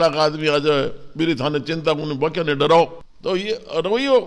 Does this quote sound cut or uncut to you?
uncut